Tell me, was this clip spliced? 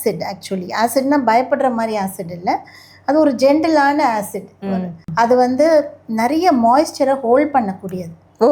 yes; 1 cut; at 5.0 s

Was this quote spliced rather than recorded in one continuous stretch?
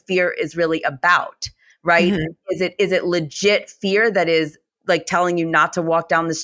no; 0 cuts

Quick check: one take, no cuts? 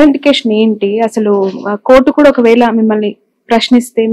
yes; 0 cuts

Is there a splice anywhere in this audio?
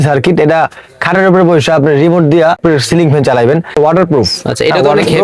yes; 2 cuts; at 2.6 s, 3.8 s

